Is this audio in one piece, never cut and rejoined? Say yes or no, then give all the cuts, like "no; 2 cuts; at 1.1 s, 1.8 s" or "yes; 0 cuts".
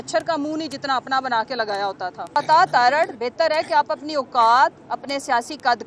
no; 1 cut; at 2.4 s